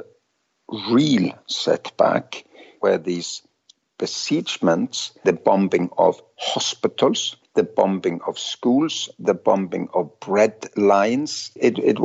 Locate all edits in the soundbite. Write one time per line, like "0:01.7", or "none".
none